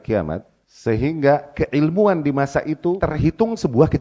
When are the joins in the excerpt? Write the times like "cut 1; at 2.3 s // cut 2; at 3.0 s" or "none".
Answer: cut 1; at 3.0 s